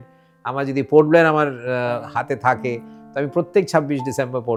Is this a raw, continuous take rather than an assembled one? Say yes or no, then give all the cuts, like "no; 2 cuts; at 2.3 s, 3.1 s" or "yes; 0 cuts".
yes; 0 cuts